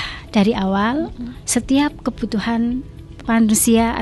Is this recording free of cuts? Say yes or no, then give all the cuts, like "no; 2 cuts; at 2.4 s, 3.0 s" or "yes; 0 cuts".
yes; 0 cuts